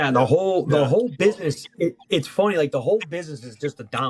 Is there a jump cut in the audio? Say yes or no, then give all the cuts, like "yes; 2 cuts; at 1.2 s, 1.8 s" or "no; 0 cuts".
no; 0 cuts